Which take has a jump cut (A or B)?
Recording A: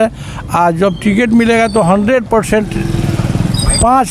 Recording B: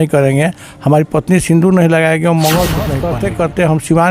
B